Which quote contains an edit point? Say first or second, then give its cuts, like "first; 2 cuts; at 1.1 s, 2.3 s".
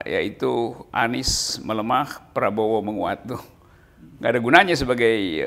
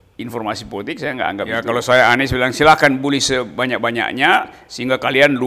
second; 1 cut; at 1.6 s